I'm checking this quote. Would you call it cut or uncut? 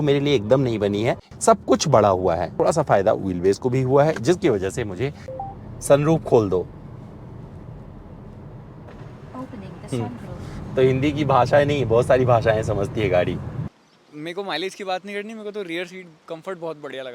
cut